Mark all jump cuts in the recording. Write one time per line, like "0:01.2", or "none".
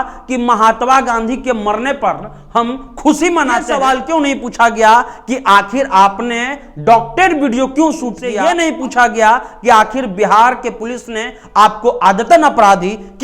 0:03.7
0:08.2